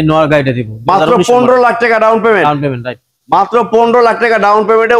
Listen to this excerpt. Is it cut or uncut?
uncut